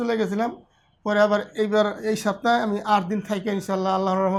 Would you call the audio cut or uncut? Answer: uncut